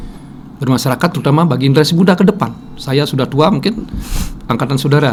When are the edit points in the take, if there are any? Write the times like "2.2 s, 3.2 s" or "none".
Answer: none